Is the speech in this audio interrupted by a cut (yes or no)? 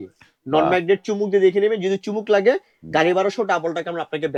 no